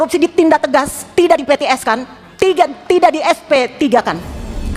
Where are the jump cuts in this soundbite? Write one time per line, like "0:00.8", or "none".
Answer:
none